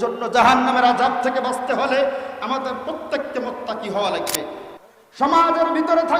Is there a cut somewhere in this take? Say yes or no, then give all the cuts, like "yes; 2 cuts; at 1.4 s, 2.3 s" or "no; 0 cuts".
yes; 1 cut; at 4.6 s